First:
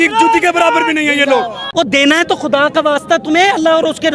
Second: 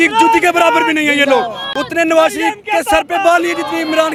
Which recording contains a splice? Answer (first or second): first